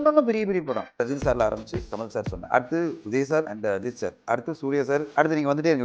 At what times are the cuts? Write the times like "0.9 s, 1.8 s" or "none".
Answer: 1.0 s, 2.4 s, 3.5 s, 5.1 s